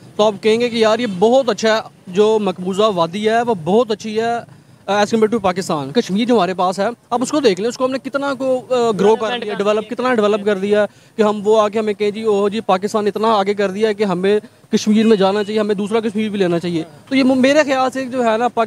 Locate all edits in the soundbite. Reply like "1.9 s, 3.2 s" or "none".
5.9 s